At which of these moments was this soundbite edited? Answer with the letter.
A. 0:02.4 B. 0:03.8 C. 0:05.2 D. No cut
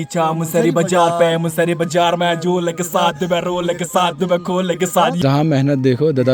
C